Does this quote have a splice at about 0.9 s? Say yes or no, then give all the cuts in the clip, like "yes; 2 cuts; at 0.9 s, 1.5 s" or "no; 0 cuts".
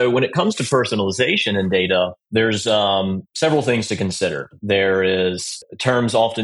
no; 4 cuts; at 2.2 s, 3.3 s, 4.5 s, 5.5 s